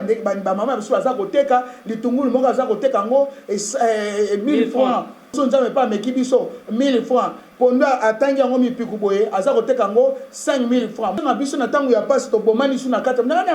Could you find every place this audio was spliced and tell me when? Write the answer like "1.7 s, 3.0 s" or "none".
5.4 s, 11.2 s